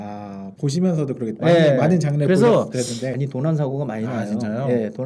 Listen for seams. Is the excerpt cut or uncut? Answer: cut